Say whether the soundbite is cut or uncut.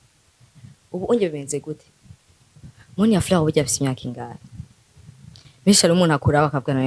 cut